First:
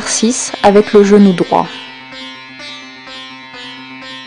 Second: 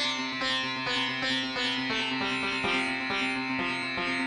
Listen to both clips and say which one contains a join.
first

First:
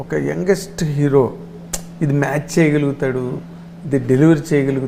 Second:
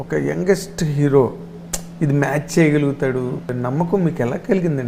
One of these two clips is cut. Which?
second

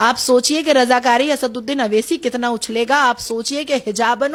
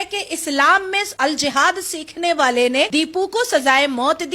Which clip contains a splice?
second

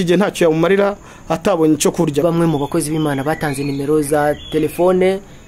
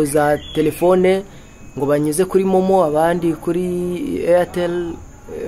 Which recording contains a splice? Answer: first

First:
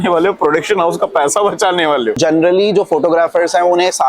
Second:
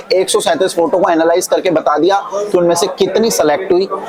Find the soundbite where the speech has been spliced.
first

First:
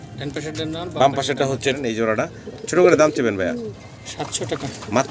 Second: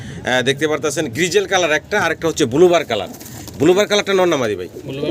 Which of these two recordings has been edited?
first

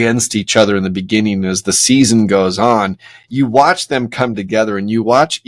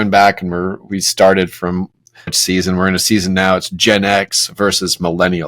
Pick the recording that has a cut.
second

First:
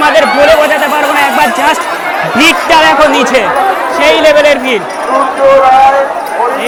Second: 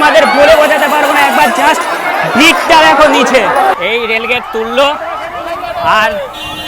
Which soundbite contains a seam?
second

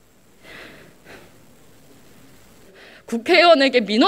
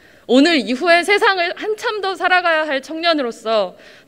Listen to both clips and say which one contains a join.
first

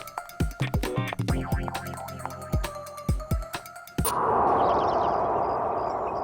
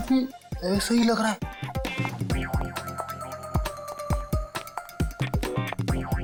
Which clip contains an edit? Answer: first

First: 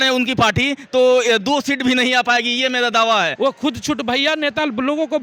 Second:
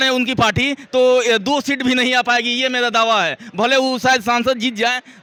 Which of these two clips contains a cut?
first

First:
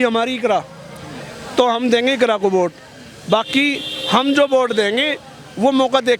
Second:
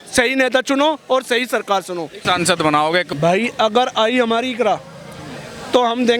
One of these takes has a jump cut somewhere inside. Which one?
second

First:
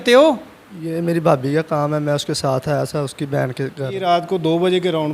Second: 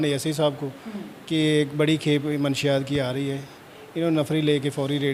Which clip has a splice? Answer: first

